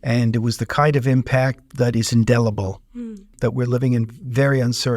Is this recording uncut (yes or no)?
no